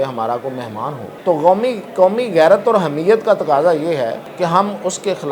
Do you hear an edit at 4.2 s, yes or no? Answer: yes